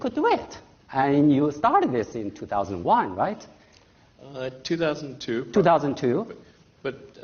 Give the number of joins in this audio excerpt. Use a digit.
1